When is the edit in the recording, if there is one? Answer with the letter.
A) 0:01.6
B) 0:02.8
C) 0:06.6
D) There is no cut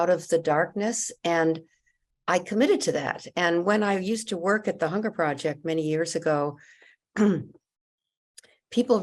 D